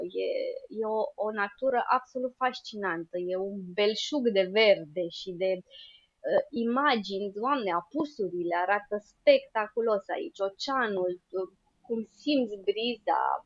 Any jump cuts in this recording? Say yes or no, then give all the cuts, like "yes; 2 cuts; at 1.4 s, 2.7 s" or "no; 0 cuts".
no; 0 cuts